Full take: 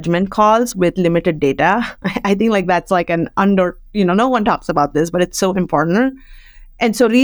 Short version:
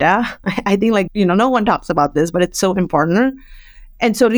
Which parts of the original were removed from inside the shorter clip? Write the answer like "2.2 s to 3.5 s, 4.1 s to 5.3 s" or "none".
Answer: 2.6 s to 3.8 s